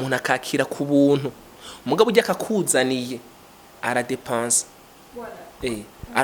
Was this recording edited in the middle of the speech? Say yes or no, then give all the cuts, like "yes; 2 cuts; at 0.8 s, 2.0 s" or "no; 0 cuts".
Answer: no; 0 cuts